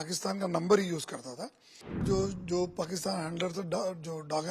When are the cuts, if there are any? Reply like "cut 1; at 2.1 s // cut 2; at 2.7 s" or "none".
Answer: cut 1; at 2.0 s